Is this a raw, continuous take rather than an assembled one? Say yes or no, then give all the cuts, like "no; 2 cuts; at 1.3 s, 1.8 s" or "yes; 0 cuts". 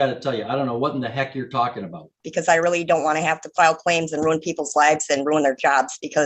no; 1 cut; at 2.3 s